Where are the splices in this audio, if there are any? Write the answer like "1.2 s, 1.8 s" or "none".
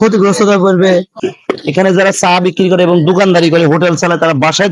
1.2 s